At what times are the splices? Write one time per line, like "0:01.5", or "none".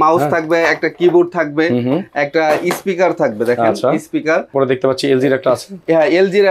0:04.5